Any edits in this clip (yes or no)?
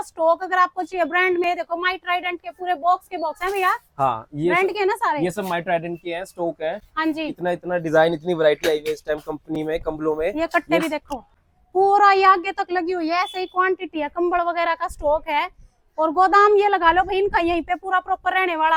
no